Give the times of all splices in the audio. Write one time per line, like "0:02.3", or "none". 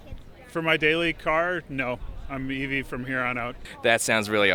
0:03.6